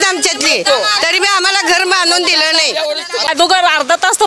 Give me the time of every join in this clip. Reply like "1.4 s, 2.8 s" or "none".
3.2 s